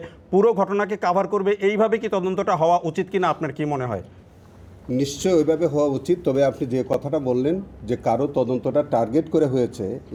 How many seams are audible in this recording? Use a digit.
0